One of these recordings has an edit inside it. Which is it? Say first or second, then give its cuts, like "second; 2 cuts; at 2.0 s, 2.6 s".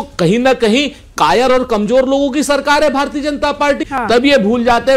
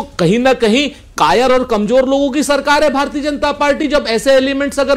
first; 1 cut; at 3.8 s